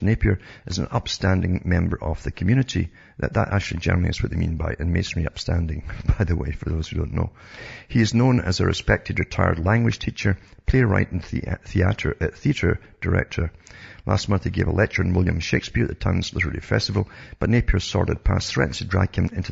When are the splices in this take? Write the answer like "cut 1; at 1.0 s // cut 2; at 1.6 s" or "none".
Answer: cut 1; at 11.5 s